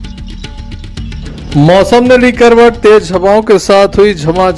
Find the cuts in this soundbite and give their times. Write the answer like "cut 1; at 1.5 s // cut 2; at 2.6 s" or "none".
none